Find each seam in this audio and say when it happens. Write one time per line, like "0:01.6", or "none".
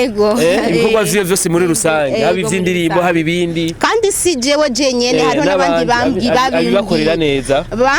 none